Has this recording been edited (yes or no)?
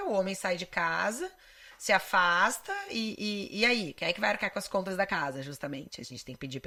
no